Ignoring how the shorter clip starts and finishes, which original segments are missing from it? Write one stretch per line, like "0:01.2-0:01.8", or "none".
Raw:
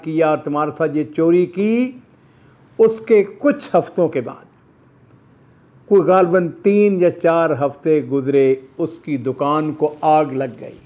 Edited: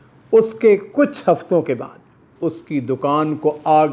0:04.8-0:08.7